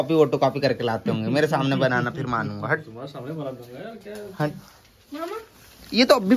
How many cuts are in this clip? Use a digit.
0